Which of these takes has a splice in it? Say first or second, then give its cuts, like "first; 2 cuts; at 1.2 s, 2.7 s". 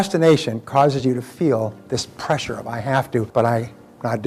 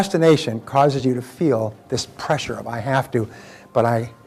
first; 1 cut; at 3.3 s